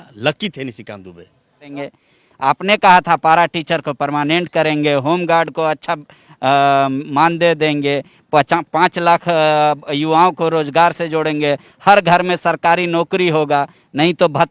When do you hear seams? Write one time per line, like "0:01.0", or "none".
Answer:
0:01.7